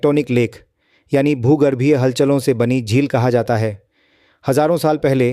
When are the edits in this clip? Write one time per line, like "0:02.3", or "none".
none